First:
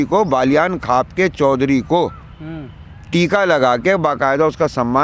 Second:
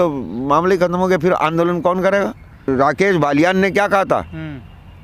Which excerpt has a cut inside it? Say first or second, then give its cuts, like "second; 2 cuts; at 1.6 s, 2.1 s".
second; 1 cut; at 2.7 s